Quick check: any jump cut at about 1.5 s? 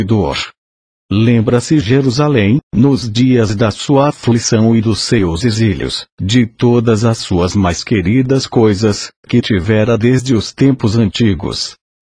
yes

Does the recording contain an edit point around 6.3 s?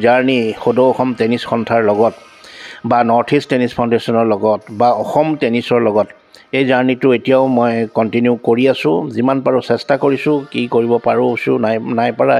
no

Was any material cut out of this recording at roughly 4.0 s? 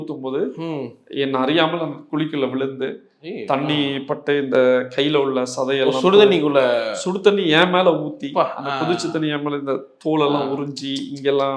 no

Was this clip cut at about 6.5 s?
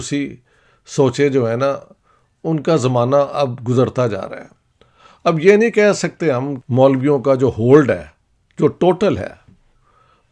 yes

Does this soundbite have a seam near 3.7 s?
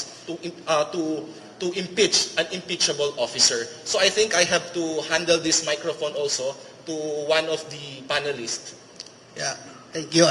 no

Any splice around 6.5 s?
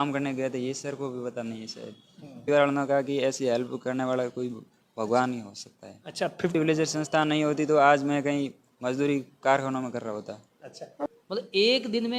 yes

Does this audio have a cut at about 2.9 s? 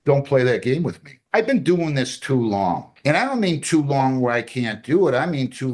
yes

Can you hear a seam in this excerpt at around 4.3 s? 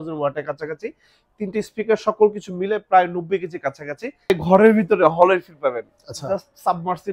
yes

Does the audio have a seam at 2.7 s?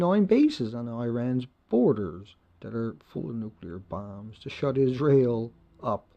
no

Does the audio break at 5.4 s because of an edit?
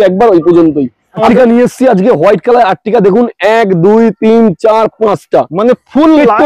no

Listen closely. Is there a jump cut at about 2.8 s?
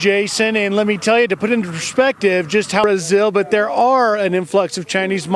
yes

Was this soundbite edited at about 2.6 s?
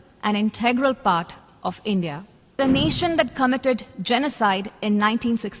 yes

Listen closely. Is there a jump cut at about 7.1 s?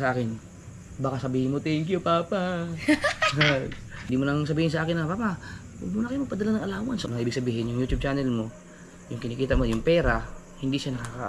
yes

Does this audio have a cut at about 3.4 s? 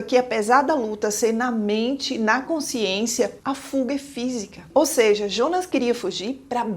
no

